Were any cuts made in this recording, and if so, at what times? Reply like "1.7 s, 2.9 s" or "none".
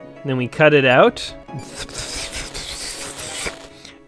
1.4 s